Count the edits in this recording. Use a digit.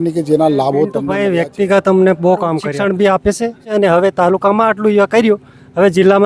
3